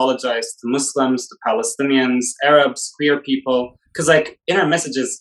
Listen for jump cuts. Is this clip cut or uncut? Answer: uncut